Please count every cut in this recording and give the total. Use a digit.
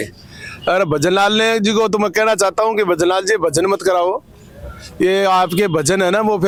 0